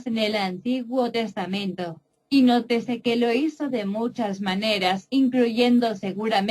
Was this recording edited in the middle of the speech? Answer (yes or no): yes